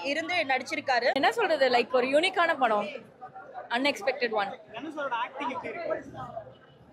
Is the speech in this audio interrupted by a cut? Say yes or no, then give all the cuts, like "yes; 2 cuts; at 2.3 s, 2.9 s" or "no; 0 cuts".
yes; 1 cut; at 1.2 s